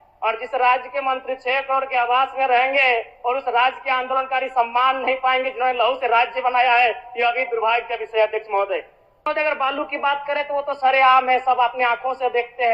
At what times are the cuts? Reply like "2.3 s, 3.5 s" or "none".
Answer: 9.3 s